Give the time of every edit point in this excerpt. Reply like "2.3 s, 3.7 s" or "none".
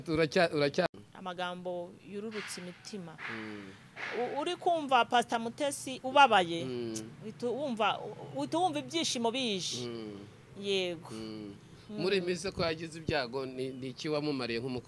0.9 s